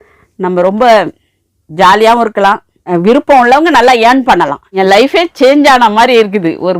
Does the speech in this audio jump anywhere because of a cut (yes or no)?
yes